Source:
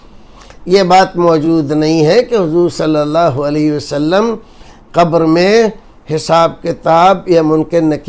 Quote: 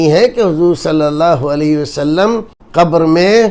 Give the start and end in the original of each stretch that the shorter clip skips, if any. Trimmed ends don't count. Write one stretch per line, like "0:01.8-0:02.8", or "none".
0:04.5-0:04.8